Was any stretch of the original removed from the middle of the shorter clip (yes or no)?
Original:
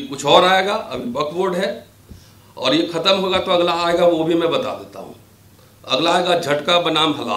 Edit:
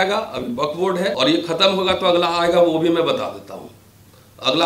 yes